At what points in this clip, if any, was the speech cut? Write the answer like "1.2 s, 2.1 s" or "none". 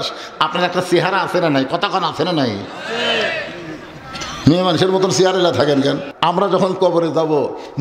6.1 s